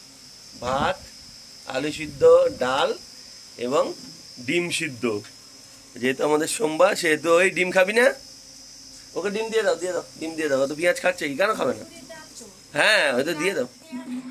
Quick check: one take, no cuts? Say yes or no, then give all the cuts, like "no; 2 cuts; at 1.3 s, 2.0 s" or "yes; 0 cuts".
yes; 0 cuts